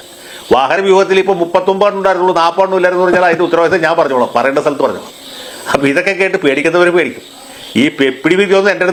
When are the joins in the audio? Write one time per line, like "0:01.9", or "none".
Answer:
none